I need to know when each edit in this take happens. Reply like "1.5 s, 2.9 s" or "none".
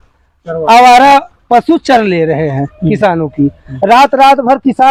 none

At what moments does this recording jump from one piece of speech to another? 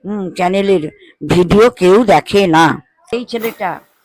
2.9 s

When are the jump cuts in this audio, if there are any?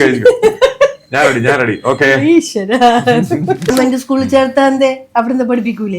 3.7 s

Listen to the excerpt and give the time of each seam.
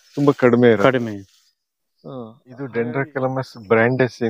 1.9 s

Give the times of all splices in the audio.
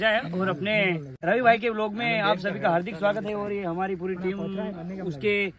1.1 s

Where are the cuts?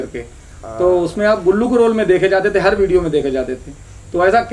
none

